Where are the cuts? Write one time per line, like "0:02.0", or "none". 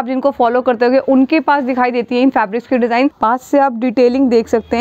0:03.2

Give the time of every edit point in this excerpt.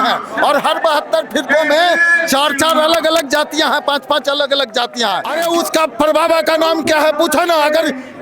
0:05.3

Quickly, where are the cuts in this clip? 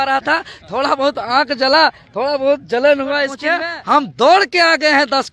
0:03.4

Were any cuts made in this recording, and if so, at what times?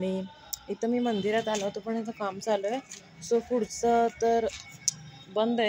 none

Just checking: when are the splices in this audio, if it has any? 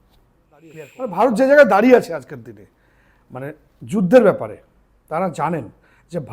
0:01.1

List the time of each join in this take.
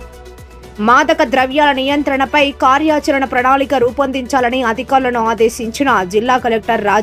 none

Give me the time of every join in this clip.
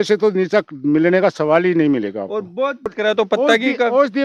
0:02.9

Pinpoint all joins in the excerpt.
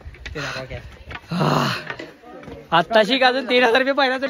none

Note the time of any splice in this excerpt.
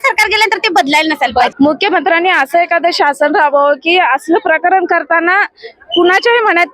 0:01.5

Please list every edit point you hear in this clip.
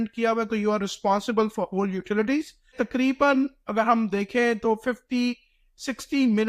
0:02.8

